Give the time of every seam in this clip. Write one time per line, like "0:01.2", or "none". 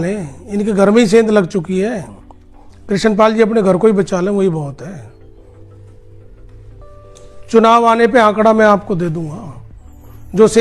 none